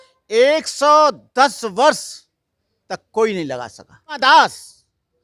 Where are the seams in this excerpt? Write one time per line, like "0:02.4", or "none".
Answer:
0:04.2

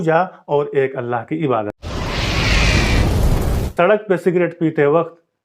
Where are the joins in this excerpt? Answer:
0:01.8
0:03.7

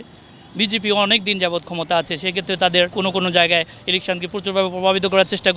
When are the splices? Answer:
0:02.9

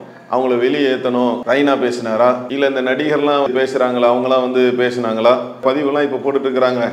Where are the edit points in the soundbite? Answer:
0:01.4
0:02.5
0:03.5

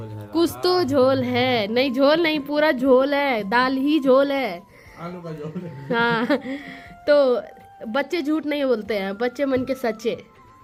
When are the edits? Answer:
none

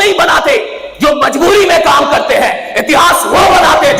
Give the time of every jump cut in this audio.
none

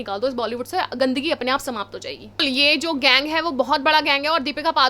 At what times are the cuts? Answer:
0:02.4

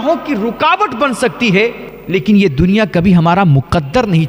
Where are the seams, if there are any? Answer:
0:01.9

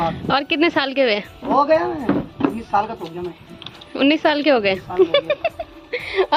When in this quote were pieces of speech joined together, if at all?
none

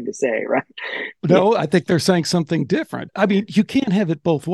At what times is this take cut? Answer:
0:01.2
0:03.0

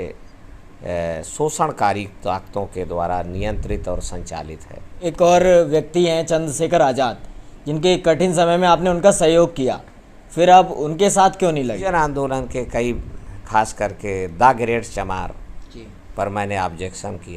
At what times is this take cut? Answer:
0:05.0
0:11.8

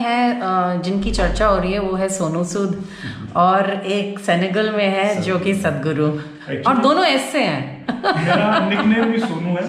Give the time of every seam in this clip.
none

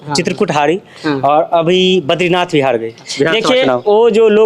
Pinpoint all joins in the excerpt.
0:03.0

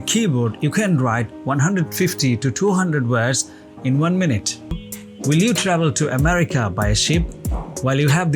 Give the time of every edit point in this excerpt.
0:04.7

